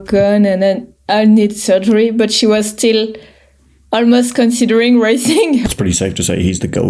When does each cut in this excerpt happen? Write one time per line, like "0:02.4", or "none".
0:05.6